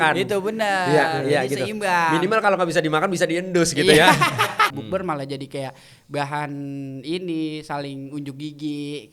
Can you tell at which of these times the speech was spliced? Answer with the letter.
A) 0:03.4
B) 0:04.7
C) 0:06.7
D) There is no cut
B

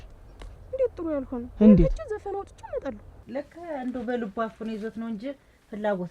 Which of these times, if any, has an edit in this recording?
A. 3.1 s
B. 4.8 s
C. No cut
A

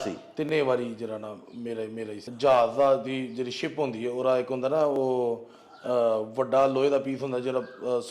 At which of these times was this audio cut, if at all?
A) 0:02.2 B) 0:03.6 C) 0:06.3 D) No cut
A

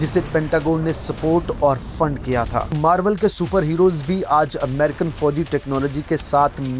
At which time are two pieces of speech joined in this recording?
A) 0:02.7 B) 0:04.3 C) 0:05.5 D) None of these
A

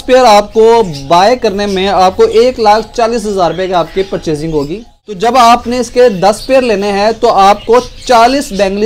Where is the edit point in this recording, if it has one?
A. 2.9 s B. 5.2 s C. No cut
B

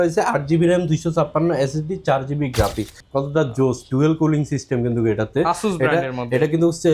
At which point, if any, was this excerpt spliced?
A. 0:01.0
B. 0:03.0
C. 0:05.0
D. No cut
B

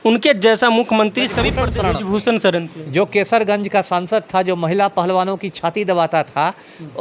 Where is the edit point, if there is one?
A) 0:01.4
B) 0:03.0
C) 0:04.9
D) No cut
A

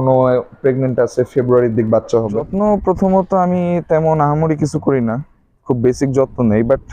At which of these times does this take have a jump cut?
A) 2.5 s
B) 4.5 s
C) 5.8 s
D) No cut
A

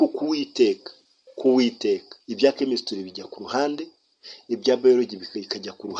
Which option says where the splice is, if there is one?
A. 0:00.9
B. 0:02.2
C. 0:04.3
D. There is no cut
B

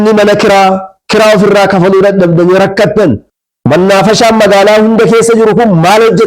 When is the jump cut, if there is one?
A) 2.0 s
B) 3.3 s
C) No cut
B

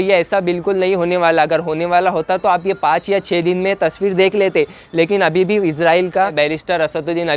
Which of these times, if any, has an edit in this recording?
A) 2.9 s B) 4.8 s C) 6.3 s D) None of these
C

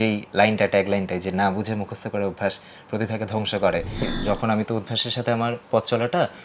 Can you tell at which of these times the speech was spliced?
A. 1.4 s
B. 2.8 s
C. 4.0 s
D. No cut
C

